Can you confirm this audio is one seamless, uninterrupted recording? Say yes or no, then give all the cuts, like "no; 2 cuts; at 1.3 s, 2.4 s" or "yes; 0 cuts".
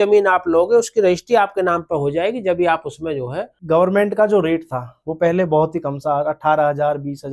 no; 1 cut; at 3.6 s